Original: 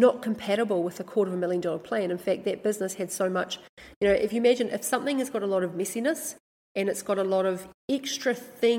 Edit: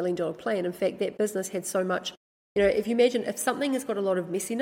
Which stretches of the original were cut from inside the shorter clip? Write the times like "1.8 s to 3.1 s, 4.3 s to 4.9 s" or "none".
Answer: none